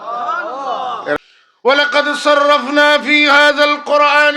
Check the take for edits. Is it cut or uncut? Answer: cut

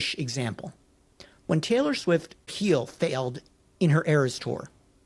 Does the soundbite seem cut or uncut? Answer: cut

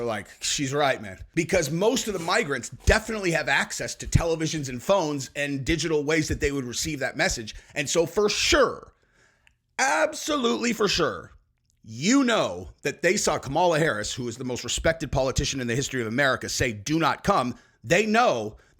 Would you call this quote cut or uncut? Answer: cut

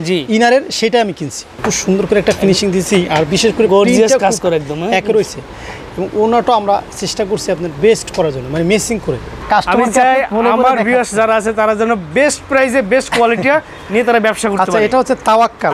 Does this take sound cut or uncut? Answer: cut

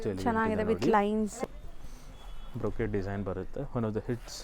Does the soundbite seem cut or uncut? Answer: cut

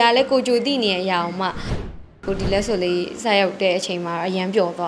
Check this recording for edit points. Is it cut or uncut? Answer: cut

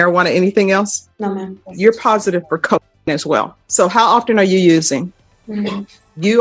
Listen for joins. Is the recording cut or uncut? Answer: cut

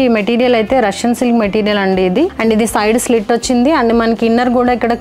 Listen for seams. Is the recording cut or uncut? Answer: uncut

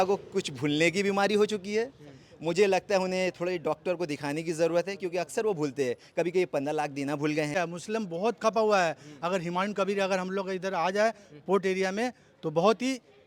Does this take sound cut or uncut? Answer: cut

